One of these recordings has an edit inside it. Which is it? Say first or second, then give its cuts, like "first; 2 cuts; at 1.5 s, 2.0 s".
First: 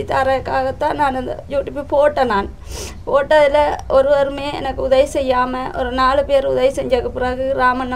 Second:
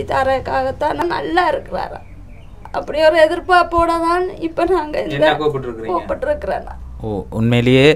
second; 1 cut; at 1.0 s